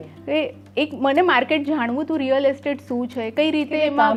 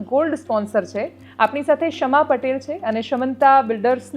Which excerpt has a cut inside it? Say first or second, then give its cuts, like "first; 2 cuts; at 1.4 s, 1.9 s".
second; 1 cut; at 1.2 s